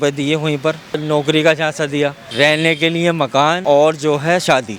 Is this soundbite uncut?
no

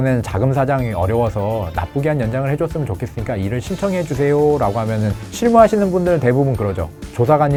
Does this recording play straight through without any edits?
yes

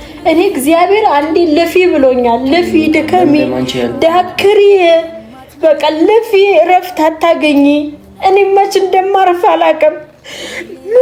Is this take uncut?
yes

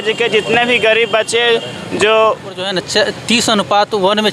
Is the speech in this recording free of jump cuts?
no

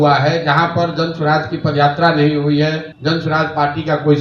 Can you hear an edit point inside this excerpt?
yes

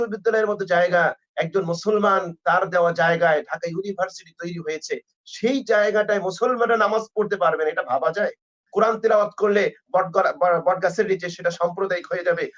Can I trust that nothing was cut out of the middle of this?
no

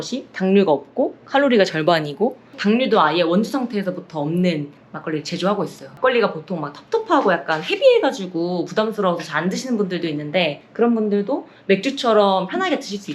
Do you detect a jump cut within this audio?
yes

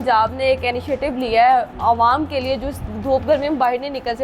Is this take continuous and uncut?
yes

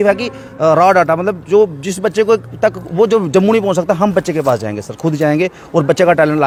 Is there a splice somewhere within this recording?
no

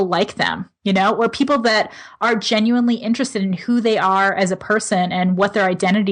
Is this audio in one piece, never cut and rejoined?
yes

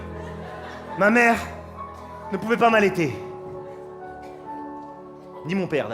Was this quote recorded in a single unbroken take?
yes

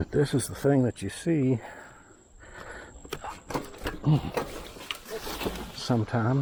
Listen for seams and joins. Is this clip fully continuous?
yes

